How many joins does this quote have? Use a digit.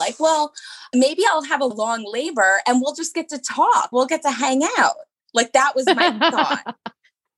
0